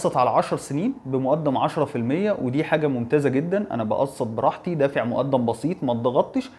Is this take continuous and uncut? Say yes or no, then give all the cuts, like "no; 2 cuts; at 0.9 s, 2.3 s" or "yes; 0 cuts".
yes; 0 cuts